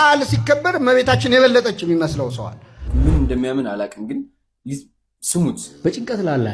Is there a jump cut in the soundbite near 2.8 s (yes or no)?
yes